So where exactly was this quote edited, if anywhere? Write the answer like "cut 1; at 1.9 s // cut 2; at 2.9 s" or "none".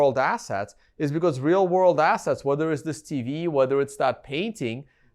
none